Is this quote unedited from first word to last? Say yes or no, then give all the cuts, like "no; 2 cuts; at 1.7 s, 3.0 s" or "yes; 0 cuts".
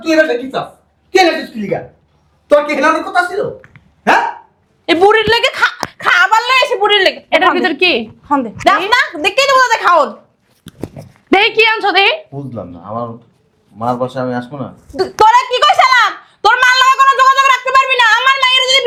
yes; 0 cuts